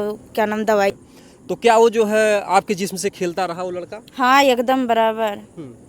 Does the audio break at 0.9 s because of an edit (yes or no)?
yes